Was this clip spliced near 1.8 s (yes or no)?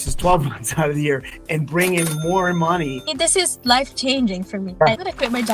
no